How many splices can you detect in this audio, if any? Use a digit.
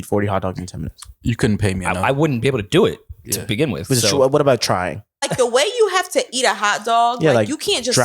1